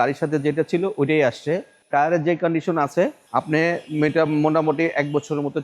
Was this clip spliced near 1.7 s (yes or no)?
yes